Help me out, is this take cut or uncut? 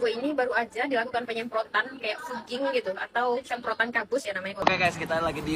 cut